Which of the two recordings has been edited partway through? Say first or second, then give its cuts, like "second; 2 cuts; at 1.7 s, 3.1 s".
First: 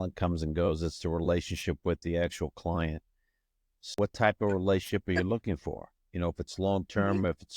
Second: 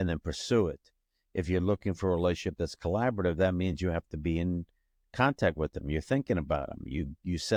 first; 1 cut; at 3.9 s